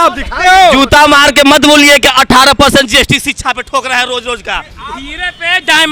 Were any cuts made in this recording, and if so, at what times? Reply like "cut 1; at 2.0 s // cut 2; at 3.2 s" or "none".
none